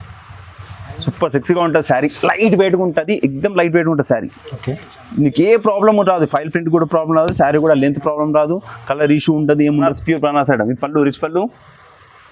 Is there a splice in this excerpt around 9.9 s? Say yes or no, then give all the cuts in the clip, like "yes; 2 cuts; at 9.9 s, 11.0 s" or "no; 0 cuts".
yes; 1 cut; at 9.9 s